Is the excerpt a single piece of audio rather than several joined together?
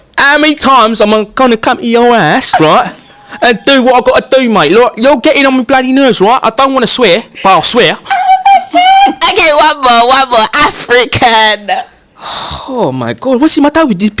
yes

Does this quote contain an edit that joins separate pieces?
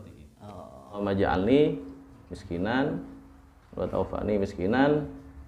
yes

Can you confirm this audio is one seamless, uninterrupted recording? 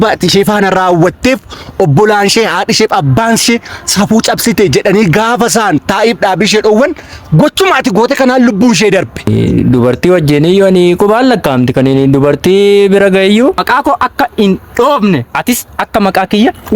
no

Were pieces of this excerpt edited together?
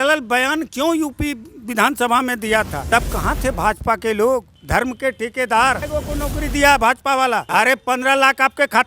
yes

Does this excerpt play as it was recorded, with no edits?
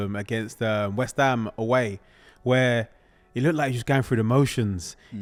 yes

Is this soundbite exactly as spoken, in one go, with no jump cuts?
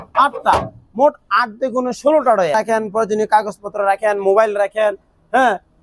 no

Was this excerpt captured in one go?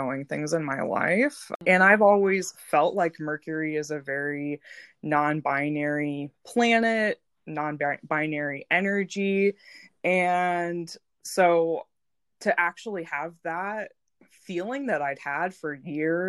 no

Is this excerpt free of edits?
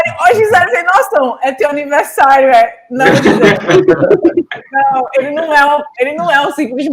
yes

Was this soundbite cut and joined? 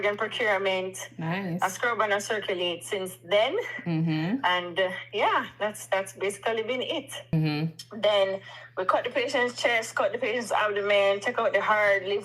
yes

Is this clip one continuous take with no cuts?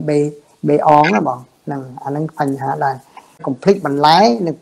no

